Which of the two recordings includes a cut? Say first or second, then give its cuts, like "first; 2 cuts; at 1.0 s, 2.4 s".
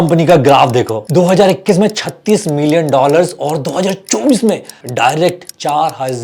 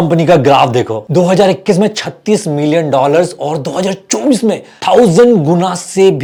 first; 1 cut; at 4.7 s